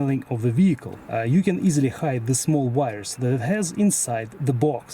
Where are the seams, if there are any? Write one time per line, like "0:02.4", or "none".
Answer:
0:01.0